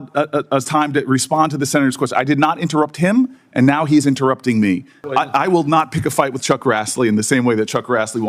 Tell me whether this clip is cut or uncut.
cut